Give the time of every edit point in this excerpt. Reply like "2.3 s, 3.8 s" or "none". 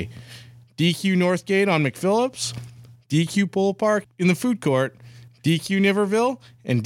4.0 s